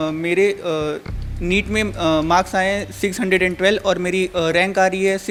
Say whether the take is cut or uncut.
uncut